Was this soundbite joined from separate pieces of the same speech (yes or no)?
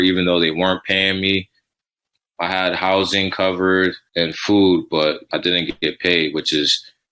yes